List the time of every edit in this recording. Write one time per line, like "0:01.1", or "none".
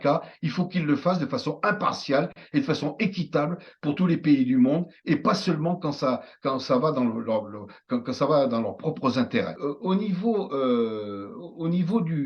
0:09.6